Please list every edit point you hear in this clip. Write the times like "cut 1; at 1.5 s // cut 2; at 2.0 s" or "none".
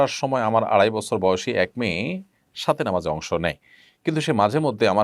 none